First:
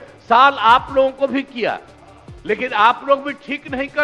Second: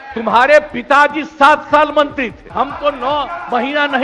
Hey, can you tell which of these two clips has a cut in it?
second; 1 cut; at 2.4 s

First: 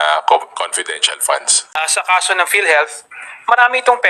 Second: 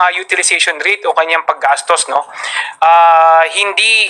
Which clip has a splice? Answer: first; 1 cut; at 1.6 s

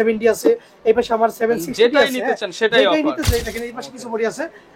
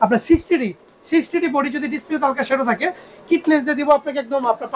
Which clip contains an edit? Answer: first; 1 cut; at 3.2 s

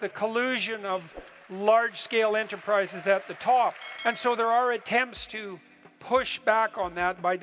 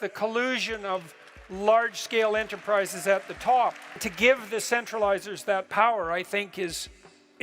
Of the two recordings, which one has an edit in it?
second; 1 cut; at 3.9 s

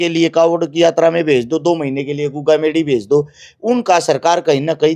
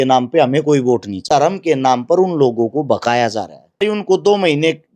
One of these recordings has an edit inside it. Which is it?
second; 2 cuts; at 1.1 s, 3.8 s

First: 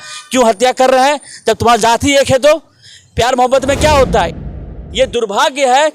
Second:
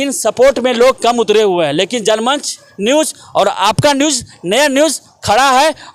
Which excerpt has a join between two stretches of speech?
first; 1 cut; at 4.5 s

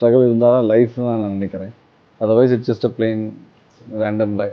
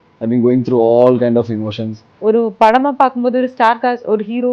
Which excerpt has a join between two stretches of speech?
second; 1 cut; at 2.2 s

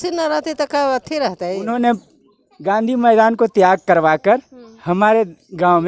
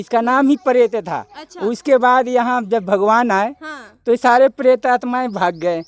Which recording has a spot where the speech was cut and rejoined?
first; 1 cut; at 1.6 s

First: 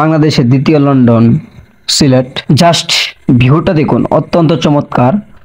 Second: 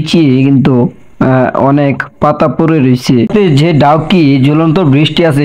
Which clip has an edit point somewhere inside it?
second; 1 cut; at 3.3 s

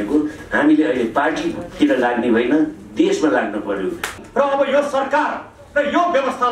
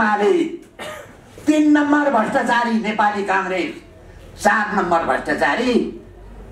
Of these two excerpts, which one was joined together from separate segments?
first; 1 cut; at 4.2 s

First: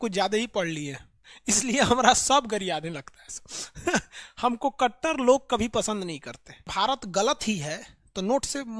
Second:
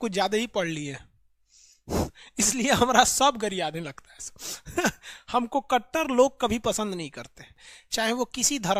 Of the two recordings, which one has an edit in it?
first; 2 cuts; at 1.3 s, 6.7 s

